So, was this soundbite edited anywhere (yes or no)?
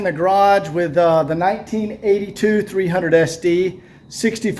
no